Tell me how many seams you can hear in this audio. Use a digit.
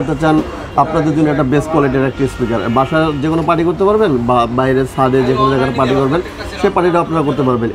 0